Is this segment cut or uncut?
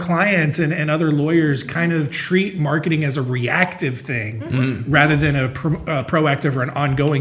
uncut